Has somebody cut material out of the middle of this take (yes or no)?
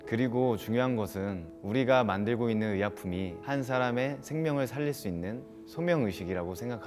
no